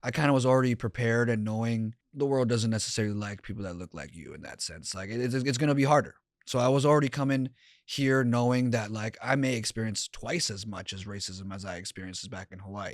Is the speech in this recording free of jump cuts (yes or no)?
no